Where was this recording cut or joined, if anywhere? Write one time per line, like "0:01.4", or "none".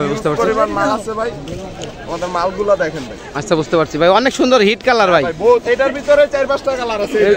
none